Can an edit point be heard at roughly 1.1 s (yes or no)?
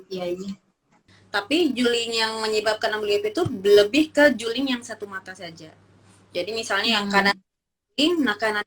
yes